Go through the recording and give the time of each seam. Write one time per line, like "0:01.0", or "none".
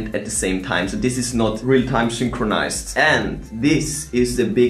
none